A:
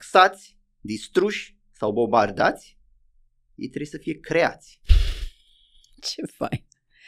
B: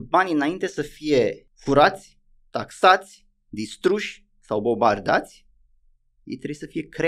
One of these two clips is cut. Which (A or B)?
B